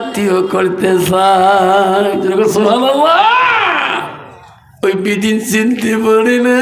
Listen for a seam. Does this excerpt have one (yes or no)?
yes